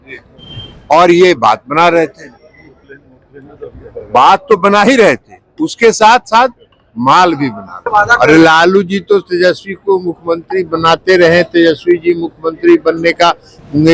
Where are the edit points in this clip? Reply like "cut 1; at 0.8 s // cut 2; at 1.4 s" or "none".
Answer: cut 1; at 7.8 s